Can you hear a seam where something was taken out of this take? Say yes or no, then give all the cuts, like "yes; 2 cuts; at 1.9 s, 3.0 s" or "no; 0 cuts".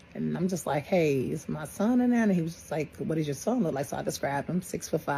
no; 0 cuts